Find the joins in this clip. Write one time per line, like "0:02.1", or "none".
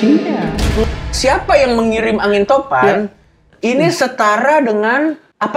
0:01.0